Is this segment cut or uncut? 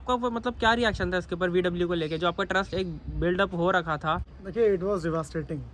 uncut